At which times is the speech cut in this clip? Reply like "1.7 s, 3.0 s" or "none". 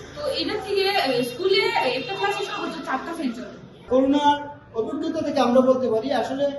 3.7 s